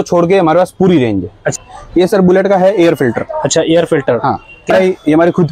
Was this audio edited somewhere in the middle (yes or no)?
yes